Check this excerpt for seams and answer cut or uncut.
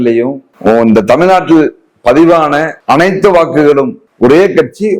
cut